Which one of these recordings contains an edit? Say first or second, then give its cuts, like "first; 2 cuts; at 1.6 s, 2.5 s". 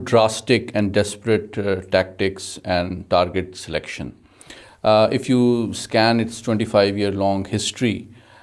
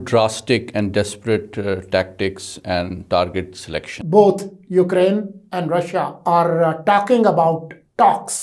second; 2 cuts; at 4.0 s, 6.2 s